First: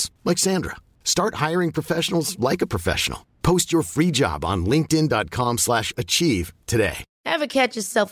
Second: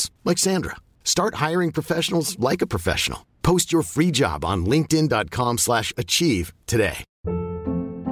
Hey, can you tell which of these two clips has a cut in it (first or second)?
first